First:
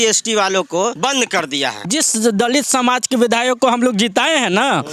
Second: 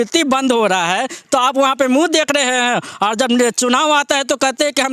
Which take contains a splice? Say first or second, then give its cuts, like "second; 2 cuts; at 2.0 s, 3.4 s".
first; 2 cuts; at 1.0 s, 1.9 s